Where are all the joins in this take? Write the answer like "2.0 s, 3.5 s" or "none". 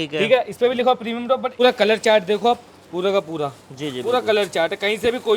1.5 s

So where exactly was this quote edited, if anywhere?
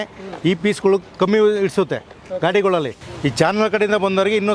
3.0 s

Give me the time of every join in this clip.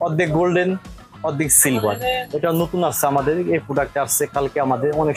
2.3 s

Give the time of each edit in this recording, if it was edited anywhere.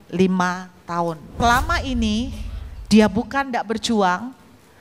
1.4 s

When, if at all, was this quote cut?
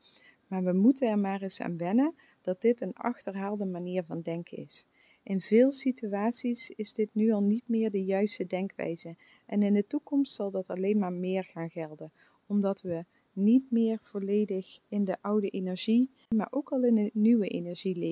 14.8 s, 16.3 s

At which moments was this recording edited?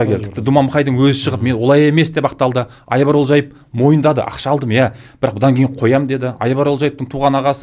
none

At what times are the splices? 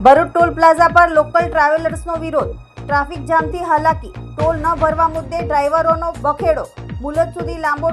6.2 s

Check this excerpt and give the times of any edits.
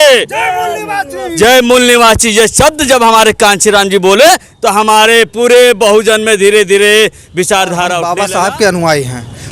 8.1 s

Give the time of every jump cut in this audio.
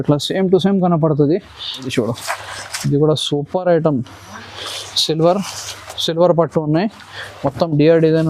1.9 s

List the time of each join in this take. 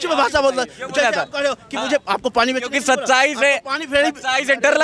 none

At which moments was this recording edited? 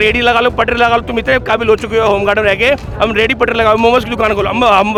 none

